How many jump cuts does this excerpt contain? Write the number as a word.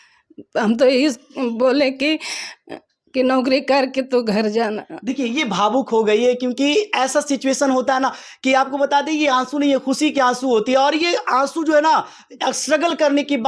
zero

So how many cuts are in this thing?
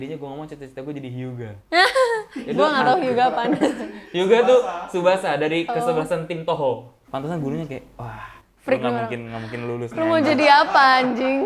one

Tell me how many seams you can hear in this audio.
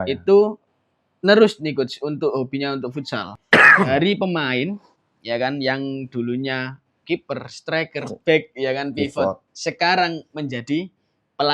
one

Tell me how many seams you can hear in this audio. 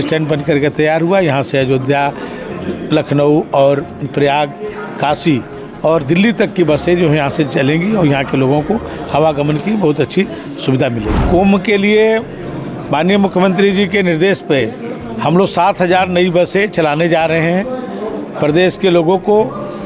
one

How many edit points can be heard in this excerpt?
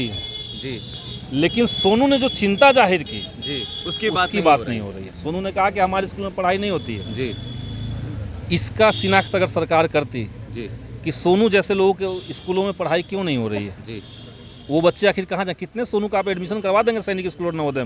zero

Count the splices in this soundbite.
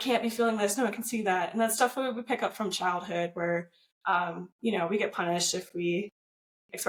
zero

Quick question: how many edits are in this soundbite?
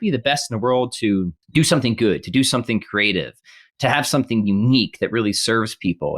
one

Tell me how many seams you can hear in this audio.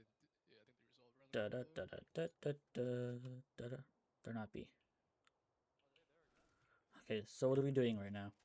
zero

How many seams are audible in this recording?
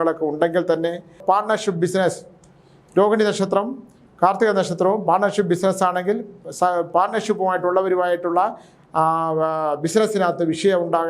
one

